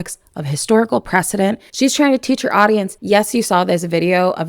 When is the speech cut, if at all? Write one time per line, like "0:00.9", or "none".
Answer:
0:01.7
0:02.9